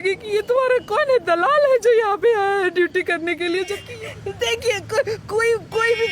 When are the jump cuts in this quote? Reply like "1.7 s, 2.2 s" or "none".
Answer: 3.8 s